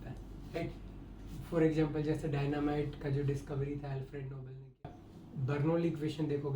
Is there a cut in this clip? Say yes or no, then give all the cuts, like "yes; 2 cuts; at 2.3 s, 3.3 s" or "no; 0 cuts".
yes; 1 cut; at 4.9 s